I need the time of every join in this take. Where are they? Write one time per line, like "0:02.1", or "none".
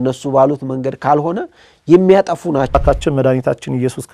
0:02.7